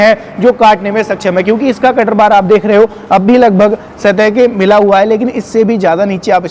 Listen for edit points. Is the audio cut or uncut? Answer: uncut